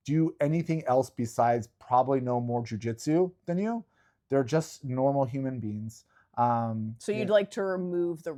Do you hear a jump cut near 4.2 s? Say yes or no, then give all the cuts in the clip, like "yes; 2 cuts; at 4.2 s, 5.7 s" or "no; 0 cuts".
no; 0 cuts